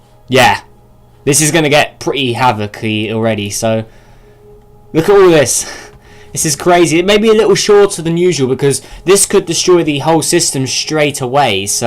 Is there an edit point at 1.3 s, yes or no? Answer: no